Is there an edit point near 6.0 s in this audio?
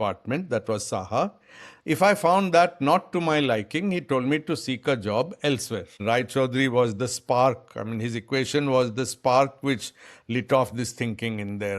yes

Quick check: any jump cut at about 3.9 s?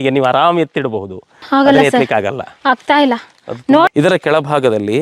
yes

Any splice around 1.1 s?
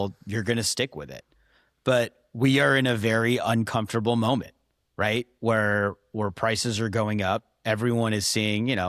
no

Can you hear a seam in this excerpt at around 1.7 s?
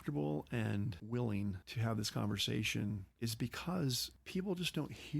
yes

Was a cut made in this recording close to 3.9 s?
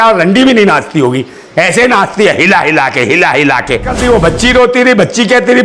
yes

